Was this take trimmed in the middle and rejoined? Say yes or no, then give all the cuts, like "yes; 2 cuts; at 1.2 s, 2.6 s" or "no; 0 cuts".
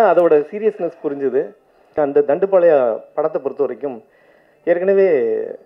yes; 1 cut; at 1.9 s